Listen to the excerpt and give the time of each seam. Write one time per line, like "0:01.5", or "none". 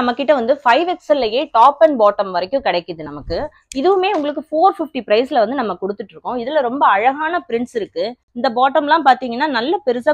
none